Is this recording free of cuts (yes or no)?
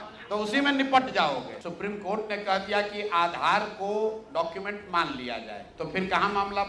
no